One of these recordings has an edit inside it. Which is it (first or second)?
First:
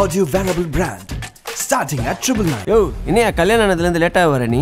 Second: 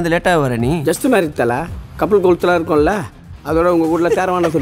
first